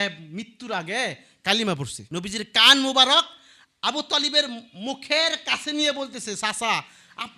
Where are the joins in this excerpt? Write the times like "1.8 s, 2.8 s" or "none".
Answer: 2.0 s

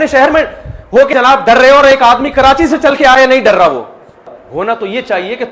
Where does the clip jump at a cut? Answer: 1.1 s, 4.3 s

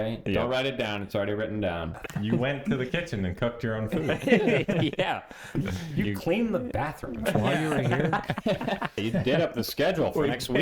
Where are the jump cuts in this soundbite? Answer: 2.1 s, 9.0 s

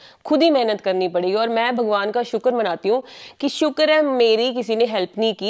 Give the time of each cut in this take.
none

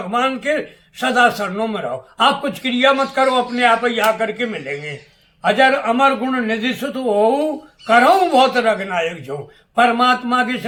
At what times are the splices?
none

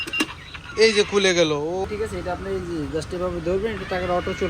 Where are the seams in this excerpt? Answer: 1.9 s

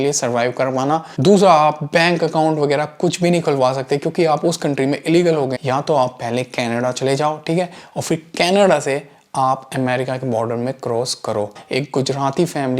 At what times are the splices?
1.1 s, 5.6 s, 11.6 s

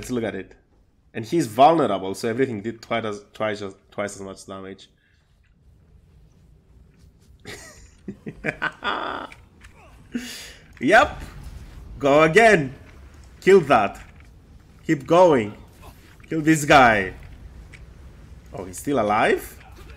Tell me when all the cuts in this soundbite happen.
none

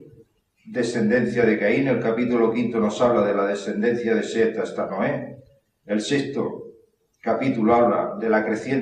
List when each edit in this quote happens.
3.7 s

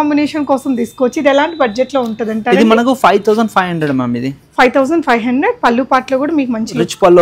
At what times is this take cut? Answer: none

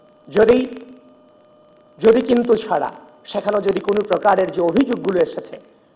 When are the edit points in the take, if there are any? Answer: 1.1 s

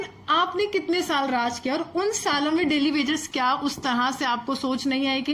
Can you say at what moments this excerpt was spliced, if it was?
none

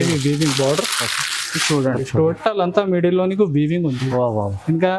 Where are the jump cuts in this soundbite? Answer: 2.0 s

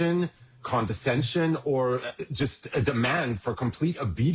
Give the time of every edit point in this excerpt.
none

